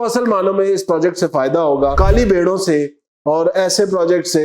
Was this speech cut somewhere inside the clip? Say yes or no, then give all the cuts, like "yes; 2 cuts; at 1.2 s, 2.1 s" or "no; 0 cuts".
yes; 1 cut; at 2.0 s